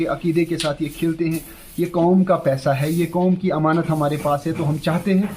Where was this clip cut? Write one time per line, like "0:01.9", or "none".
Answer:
none